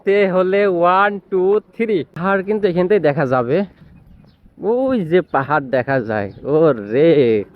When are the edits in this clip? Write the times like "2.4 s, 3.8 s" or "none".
2.2 s